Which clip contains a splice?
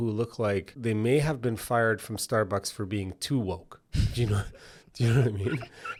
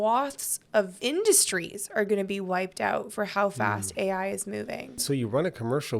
second; 2 cuts; at 0.9 s, 5.0 s

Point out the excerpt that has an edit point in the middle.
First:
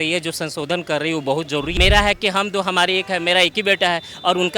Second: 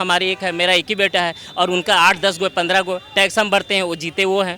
first; 1 cut; at 1.7 s

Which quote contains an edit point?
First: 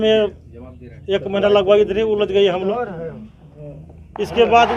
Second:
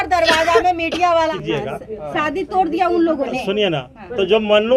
second; 1 cut; at 1.3 s

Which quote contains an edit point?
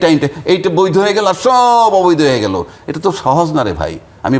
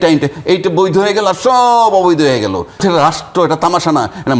second; 1 cut; at 2.8 s

